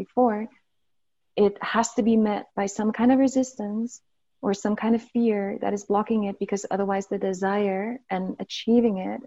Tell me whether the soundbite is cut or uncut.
uncut